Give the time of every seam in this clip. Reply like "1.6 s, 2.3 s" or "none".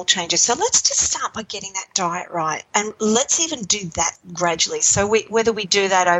2.7 s, 4.2 s